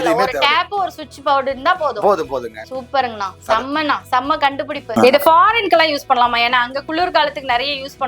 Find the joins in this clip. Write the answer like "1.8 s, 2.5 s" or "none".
4.8 s